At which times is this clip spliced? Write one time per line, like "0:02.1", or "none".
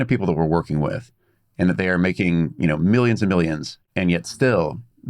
0:03.7